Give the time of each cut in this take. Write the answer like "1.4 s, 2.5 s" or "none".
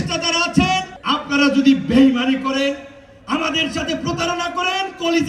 0.9 s